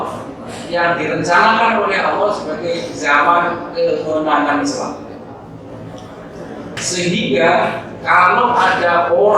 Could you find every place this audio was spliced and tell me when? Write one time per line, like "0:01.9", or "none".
0:06.8